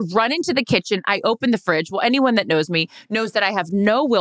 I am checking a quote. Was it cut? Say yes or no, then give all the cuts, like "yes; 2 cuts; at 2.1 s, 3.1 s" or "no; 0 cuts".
no; 0 cuts